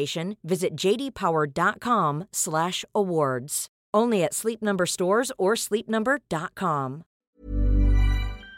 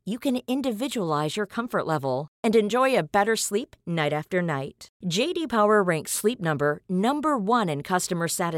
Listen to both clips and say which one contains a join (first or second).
first